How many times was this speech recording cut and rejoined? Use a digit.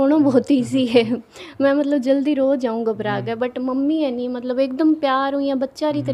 0